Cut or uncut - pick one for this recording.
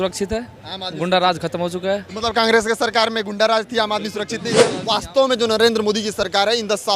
cut